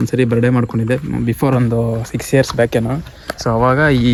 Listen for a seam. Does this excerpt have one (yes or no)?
no